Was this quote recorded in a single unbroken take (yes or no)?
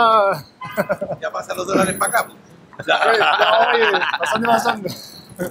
yes